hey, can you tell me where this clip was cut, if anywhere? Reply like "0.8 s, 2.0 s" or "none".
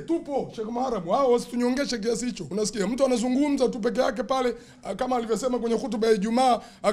2.4 s